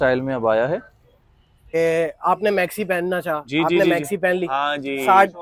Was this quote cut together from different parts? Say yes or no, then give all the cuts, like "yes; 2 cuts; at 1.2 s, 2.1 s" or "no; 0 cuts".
yes; 1 cut; at 1.7 s